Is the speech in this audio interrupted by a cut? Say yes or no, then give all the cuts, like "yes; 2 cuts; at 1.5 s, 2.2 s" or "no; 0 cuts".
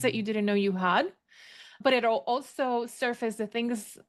yes; 1 cut; at 1.8 s